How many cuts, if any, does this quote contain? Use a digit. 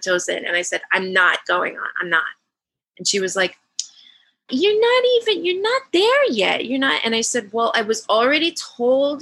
0